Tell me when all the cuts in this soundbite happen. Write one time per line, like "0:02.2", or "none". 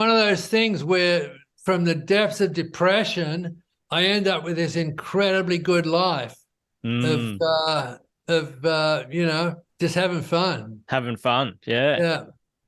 0:09.7